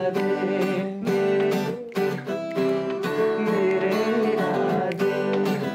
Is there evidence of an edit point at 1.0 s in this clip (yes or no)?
no